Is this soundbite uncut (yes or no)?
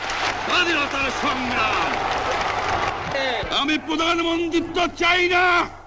no